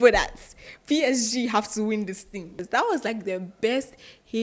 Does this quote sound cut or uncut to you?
cut